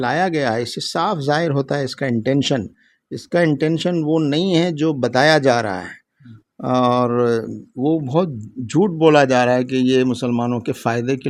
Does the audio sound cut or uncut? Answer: uncut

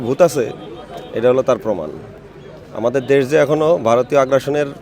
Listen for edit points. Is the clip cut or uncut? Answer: uncut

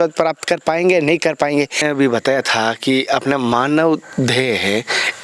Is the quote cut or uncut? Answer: cut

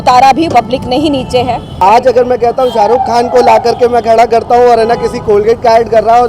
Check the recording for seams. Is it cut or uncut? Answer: cut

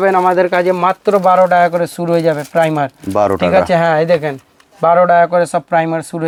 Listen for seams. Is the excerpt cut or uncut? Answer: uncut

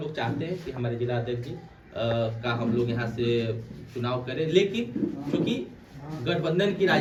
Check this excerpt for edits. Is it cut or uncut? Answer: uncut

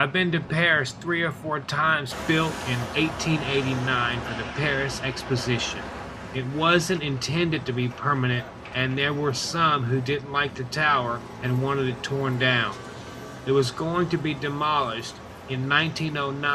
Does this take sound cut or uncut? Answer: uncut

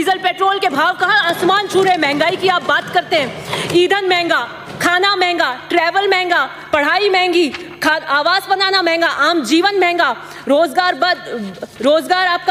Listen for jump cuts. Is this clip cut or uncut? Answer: uncut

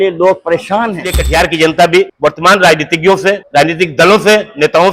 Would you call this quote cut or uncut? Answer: cut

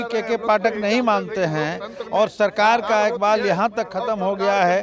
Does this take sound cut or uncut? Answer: uncut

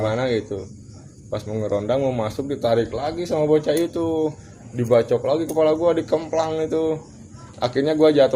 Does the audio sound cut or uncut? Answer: cut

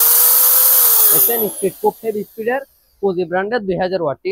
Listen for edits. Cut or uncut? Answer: uncut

